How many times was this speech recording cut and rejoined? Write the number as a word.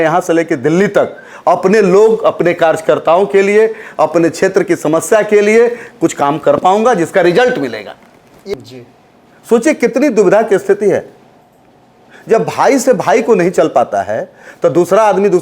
one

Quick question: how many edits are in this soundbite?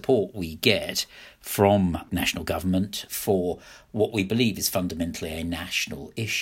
two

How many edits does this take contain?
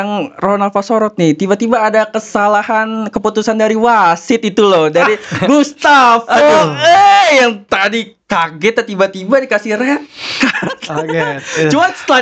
zero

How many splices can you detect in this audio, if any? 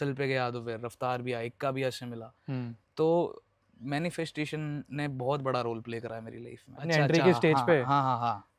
one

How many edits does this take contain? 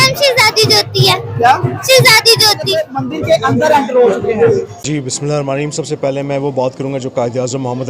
two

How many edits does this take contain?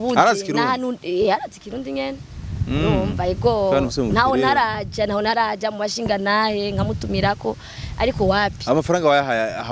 zero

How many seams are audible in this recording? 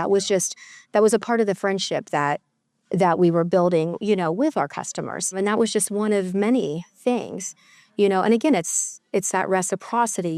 one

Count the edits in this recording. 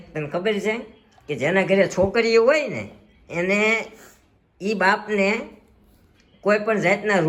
zero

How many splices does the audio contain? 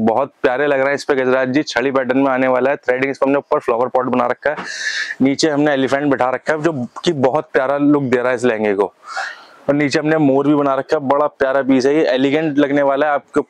zero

